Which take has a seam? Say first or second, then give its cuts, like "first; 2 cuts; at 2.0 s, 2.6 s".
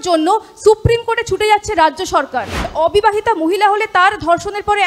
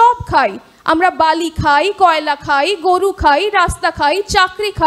first; 1 cut; at 2.7 s